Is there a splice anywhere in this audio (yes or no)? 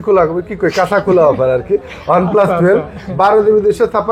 no